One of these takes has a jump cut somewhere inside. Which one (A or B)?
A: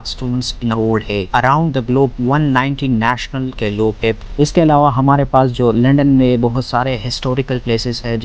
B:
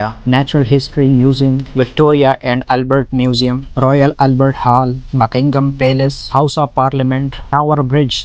A